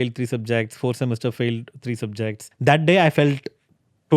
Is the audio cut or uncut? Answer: cut